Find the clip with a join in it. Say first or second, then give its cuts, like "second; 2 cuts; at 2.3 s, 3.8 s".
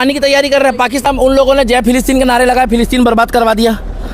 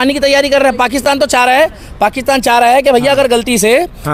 first; 1 cut; at 1.0 s